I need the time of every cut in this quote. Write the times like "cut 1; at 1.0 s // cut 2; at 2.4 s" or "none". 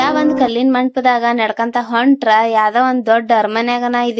none